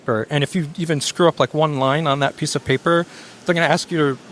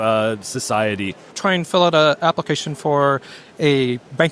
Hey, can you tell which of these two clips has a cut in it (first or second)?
second